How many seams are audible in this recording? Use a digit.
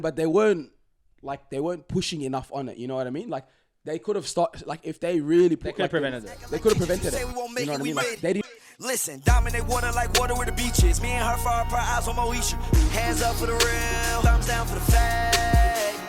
1